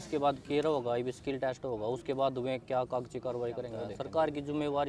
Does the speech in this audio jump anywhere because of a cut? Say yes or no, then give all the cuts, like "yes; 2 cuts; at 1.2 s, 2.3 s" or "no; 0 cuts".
yes; 1 cut; at 3.9 s